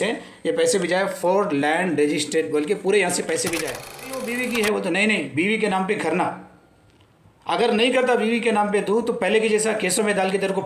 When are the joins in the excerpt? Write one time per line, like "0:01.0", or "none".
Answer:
0:04.2